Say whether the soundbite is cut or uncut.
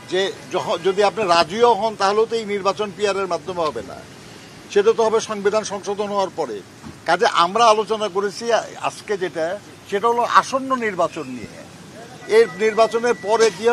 uncut